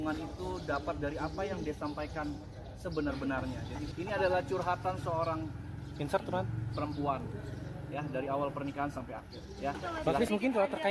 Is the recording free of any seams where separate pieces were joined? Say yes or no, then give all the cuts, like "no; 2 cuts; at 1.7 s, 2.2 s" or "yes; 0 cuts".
no; 2 cuts; at 3.7 s, 10.0 s